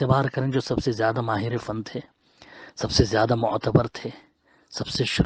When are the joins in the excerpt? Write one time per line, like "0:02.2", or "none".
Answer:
none